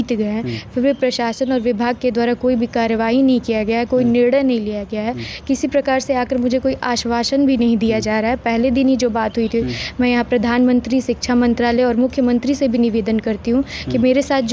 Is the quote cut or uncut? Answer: uncut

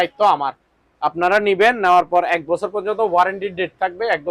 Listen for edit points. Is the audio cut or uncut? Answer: uncut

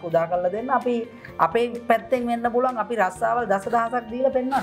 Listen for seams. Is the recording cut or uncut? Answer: uncut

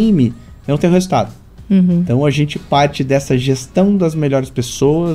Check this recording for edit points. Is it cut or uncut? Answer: uncut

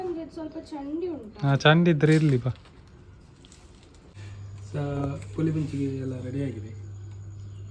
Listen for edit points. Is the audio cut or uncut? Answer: cut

